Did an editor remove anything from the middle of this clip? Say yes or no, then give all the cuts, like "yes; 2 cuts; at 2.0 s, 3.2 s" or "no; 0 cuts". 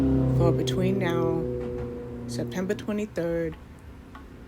no; 0 cuts